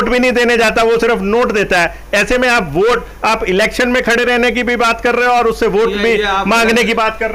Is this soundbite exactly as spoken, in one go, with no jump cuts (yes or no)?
yes